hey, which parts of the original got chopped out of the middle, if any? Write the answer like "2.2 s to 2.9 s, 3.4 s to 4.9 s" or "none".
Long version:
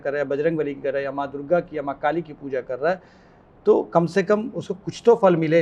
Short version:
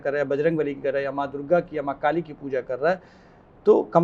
none